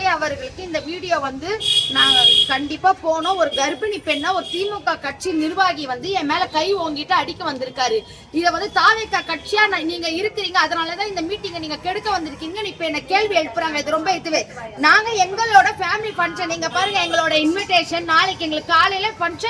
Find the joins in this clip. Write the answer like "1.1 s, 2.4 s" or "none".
none